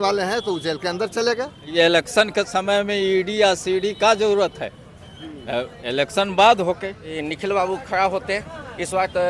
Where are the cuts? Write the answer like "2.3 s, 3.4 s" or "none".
1.7 s, 7.1 s